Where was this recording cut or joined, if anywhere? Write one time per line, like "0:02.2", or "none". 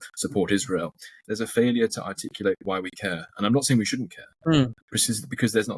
0:01.2
0:04.7